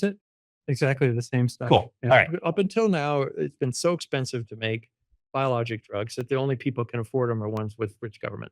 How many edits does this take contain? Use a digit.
1